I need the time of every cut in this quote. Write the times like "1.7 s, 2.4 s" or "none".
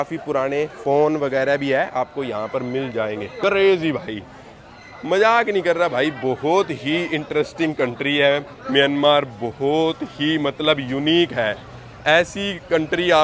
none